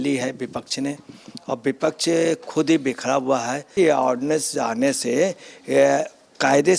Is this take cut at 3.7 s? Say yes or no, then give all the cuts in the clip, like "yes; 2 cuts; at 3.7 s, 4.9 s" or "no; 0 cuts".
yes; 1 cut; at 3.7 s